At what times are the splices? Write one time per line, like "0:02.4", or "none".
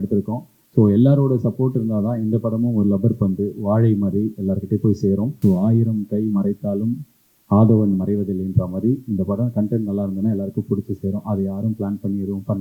0:05.4